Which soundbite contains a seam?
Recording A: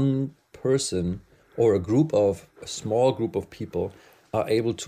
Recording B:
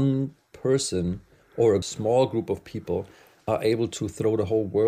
B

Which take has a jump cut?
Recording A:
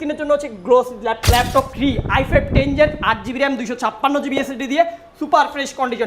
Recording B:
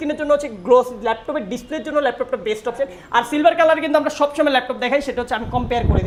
A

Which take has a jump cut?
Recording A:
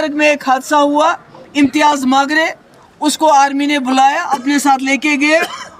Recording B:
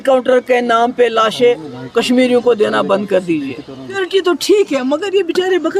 B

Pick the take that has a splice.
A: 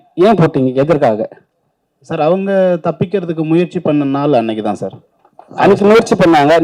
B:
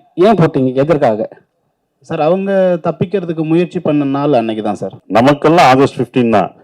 B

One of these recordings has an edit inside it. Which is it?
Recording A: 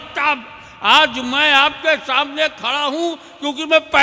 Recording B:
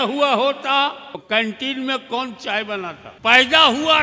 B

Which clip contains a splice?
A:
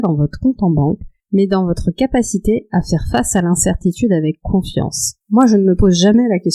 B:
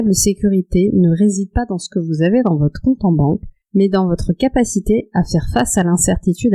A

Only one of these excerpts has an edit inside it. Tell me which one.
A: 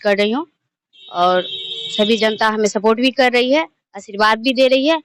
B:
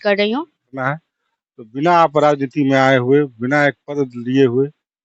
B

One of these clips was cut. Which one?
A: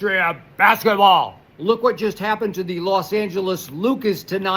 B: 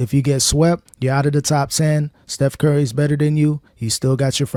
A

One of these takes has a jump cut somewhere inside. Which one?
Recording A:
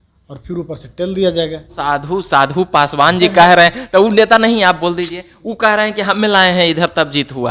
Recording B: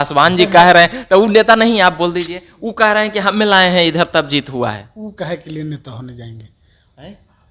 A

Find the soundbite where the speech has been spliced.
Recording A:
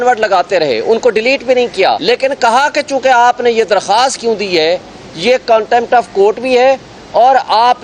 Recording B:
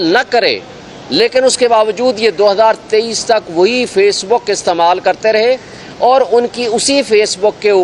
A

